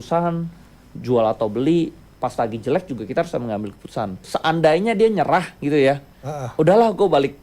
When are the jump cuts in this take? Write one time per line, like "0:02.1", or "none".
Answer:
0:04.2